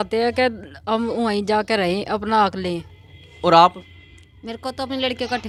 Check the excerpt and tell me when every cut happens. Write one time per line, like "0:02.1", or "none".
none